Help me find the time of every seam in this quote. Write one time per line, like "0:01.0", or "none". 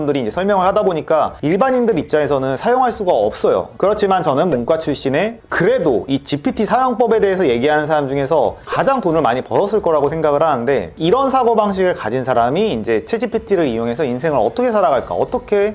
none